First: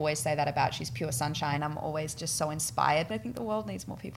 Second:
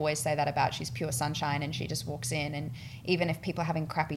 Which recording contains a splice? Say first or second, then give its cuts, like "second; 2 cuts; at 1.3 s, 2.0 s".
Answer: first; 2 cuts; at 1.6 s, 3.1 s